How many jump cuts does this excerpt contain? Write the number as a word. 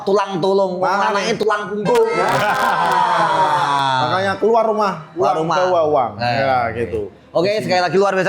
zero